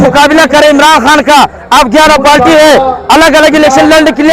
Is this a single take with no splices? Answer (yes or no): yes